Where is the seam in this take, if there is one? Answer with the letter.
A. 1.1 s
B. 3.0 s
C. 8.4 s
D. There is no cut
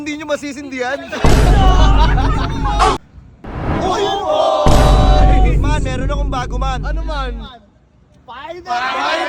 B